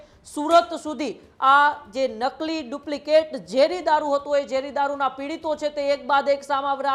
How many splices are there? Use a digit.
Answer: 0